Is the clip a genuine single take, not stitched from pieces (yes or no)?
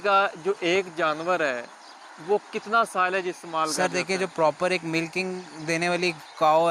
yes